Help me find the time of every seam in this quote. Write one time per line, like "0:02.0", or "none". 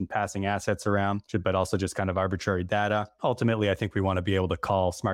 0:01.2
0:03.1